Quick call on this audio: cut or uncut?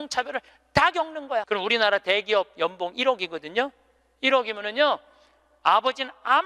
cut